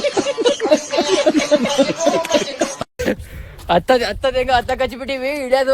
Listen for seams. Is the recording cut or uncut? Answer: cut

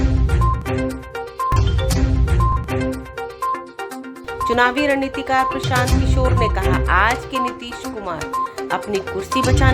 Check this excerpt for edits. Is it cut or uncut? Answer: uncut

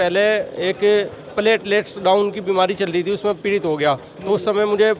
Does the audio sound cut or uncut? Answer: uncut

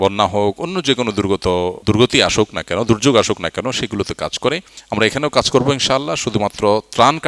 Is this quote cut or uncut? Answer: cut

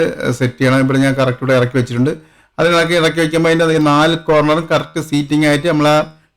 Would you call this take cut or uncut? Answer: uncut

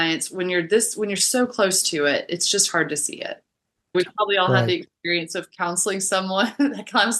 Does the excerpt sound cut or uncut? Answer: cut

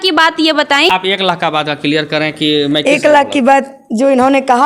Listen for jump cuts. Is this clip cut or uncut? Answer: cut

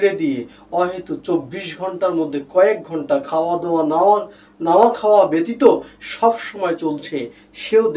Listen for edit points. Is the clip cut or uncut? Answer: uncut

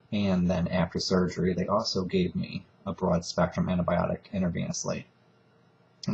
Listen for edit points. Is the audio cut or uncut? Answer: cut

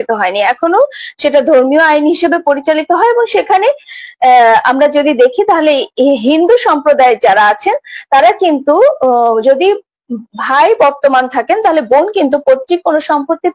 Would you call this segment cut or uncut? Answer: uncut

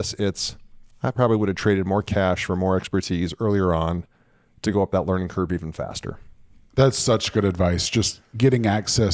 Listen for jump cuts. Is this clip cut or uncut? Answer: uncut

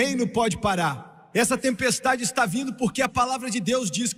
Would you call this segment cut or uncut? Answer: uncut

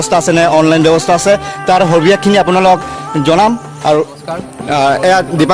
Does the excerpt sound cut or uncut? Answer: cut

